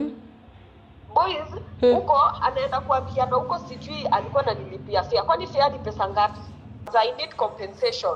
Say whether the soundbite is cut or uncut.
cut